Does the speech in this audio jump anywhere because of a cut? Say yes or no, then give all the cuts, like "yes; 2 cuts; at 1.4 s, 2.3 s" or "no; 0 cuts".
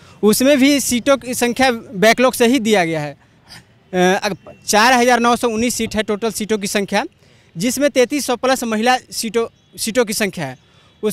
no; 0 cuts